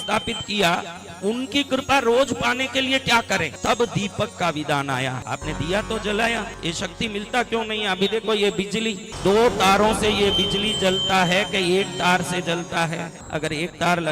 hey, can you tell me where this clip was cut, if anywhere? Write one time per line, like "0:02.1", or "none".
0:03.5
0:05.2
0:06.5
0:09.1
0:13.2